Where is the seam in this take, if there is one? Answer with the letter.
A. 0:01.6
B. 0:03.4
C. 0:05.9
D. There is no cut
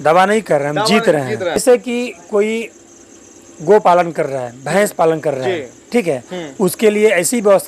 A